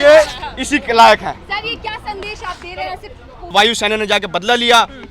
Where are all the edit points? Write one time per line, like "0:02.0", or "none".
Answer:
0:03.5